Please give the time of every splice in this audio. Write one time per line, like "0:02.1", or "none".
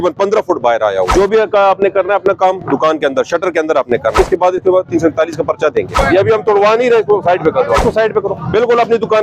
0:01.1
0:04.1
0:06.0
0:07.8